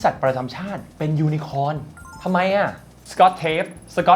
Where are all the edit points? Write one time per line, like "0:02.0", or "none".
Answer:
0:03.0